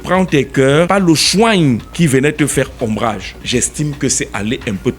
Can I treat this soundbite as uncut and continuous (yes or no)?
no